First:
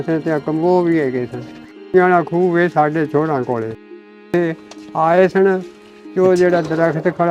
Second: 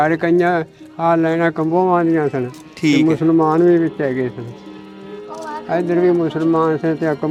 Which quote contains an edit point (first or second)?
first